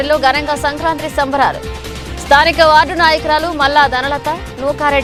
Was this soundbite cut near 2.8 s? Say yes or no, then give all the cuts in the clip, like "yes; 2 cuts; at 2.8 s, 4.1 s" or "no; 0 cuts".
no; 0 cuts